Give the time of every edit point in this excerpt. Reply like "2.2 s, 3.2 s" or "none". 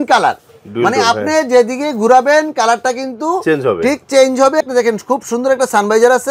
4.6 s